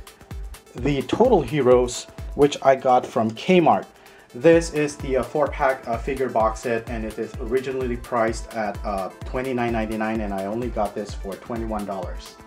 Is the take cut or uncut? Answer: uncut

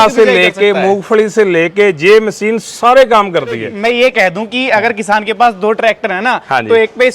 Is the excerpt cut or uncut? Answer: cut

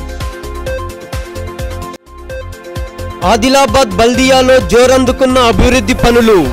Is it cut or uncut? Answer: uncut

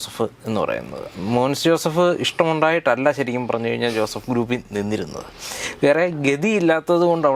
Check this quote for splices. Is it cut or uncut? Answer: uncut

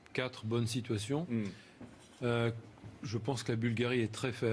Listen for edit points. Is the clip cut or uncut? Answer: cut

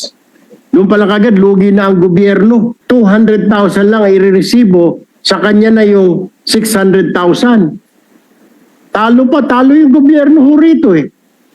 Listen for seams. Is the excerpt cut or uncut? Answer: cut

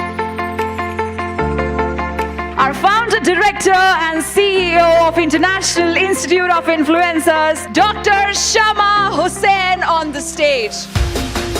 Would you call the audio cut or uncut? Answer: cut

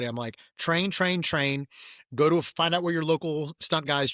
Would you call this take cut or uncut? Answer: uncut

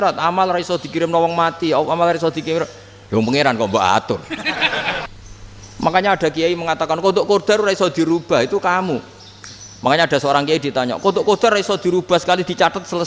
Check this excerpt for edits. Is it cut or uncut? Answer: cut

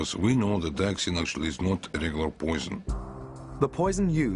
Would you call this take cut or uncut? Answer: cut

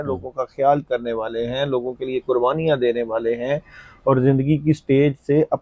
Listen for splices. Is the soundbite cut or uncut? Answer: uncut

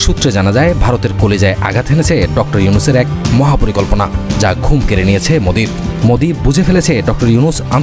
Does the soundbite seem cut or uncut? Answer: uncut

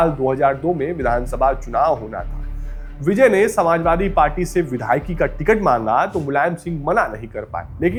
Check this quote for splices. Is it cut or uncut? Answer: uncut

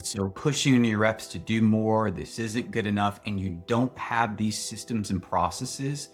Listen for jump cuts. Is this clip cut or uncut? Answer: uncut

